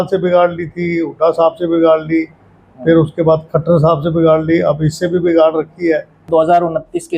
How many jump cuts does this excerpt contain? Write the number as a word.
one